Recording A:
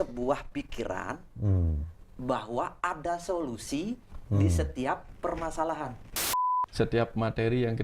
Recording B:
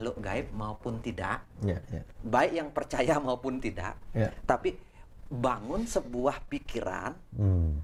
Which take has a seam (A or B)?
A